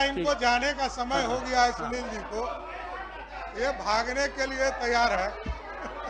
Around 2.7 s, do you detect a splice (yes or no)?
no